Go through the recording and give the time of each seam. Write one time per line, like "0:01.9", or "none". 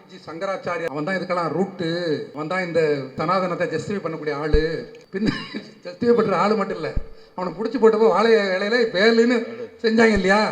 0:00.9
0:02.3
0:03.2
0:05.0